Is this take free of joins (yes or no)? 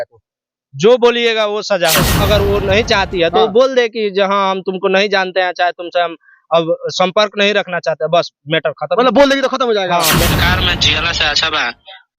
no